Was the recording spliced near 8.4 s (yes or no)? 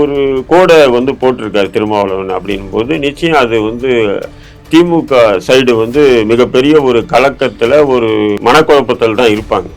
yes